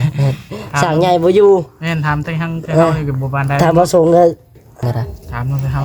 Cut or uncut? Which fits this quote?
cut